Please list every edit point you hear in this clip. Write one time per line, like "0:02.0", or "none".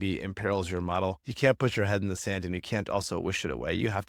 none